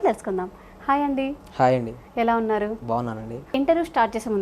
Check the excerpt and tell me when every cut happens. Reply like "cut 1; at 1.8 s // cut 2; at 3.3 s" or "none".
cut 1; at 3.5 s